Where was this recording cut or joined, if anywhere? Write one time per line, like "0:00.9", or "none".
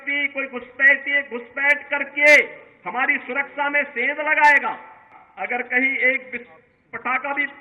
0:05.2